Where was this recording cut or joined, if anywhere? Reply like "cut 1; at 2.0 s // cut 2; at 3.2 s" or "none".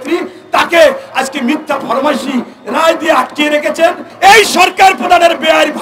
cut 1; at 4.1 s